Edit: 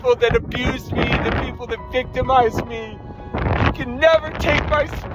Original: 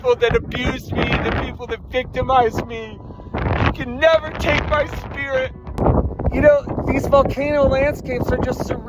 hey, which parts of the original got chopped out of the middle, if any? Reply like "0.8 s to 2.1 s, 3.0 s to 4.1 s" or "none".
none